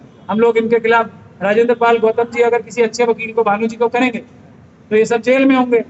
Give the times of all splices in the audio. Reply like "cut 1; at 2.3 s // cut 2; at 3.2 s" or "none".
none

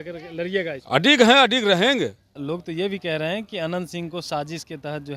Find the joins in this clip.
cut 1; at 2.4 s

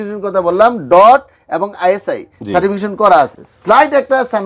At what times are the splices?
cut 1; at 3.4 s

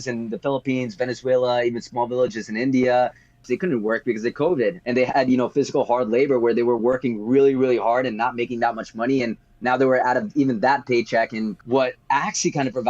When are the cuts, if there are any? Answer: cut 1; at 3.4 s // cut 2; at 4.8 s // cut 3; at 11.6 s

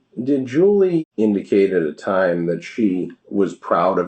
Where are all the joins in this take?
cut 1; at 1.1 s // cut 2; at 3.2 s

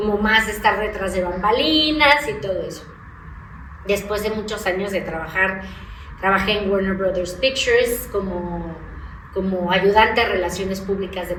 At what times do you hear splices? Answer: none

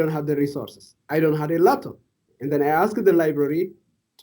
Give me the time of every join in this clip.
cut 1; at 2.3 s

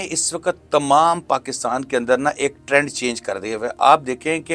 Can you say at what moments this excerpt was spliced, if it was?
none

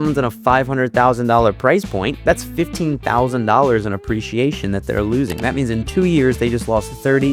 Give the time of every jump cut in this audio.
none

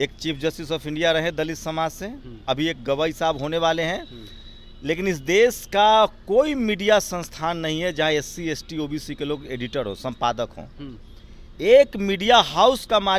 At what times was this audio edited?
none

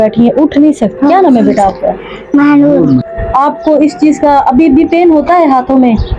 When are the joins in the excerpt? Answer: cut 1; at 0.9 s // cut 2; at 3.1 s

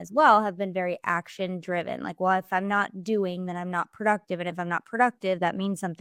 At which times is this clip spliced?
none

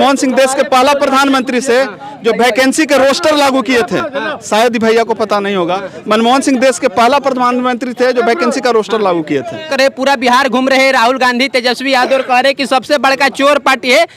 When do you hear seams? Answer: none

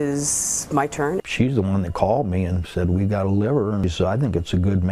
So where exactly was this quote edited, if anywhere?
cut 1; at 3.8 s

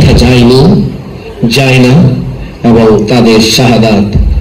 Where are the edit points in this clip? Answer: none

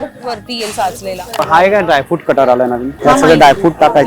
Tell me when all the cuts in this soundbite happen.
cut 1; at 1.3 s // cut 2; at 2.9 s

